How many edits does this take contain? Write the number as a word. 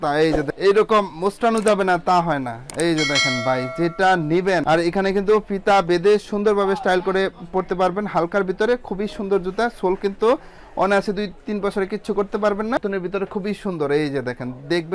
two